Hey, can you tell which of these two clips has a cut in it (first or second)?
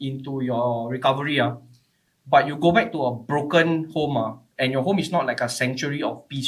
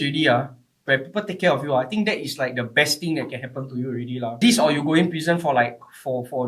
second